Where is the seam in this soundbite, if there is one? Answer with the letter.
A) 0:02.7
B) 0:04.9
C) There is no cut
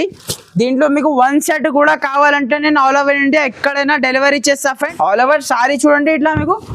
B